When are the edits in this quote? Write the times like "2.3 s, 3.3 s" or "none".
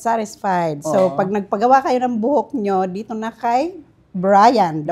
none